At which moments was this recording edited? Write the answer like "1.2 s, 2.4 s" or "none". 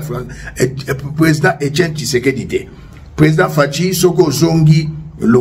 none